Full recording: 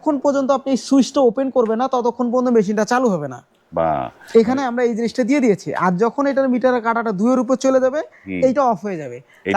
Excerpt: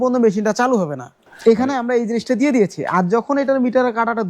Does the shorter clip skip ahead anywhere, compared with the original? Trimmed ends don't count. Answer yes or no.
yes